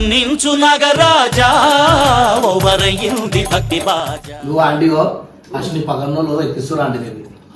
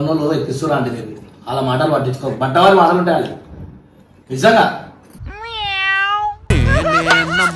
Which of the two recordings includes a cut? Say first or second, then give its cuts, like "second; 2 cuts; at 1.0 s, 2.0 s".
first; 1 cut; at 4.3 s